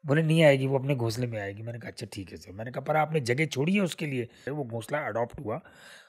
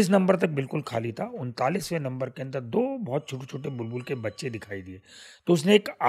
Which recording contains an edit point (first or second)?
first